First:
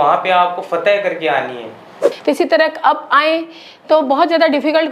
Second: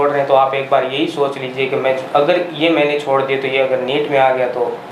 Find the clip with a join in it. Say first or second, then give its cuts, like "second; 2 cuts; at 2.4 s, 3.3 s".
first; 1 cut; at 2.0 s